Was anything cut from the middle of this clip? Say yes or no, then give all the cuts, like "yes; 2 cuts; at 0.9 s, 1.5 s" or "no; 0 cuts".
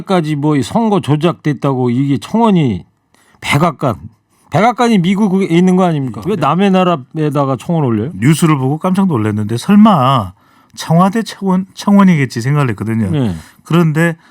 yes; 1 cut; at 6.2 s